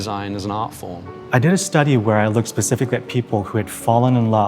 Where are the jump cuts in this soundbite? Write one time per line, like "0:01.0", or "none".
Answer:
0:01.2